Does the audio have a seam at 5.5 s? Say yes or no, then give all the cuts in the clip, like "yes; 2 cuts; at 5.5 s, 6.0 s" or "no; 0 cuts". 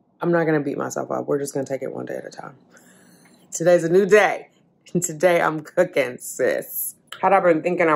no; 1 cut; at 6.7 s